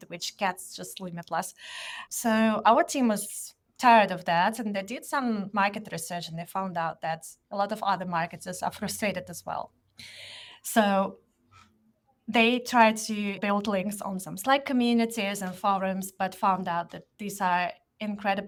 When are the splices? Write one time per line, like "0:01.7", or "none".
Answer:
none